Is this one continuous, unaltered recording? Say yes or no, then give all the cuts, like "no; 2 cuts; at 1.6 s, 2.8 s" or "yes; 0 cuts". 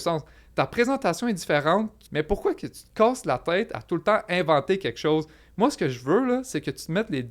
no; 1 cut; at 2.0 s